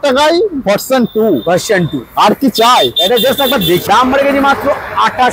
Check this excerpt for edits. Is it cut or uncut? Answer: cut